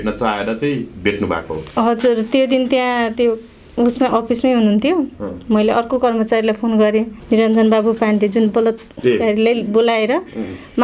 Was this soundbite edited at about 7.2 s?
yes; 1 cut; at 7.2 s

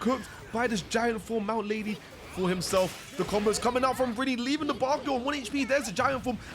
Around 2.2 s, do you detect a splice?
yes; 1 cut; at 2.2 s

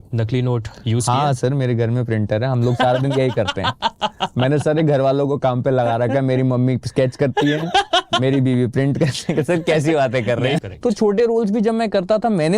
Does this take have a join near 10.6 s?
yes; 1 cut; at 10.6 s

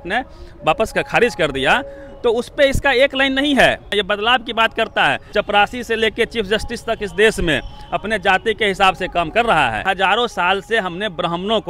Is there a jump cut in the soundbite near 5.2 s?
yes; 3 cuts; at 3.9 s, 5.2 s, 9.8 s

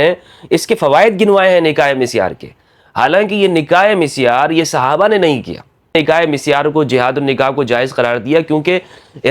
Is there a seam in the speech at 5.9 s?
yes; 1 cut; at 5.9 s

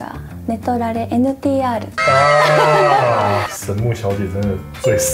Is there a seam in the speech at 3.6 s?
yes; 1 cut; at 3.6 s

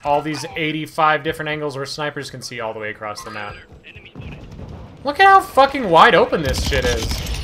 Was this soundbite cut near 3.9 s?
no; 0 cuts

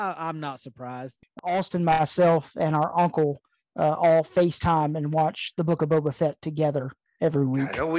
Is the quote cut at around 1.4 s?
yes; 1 cut; at 1.4 s

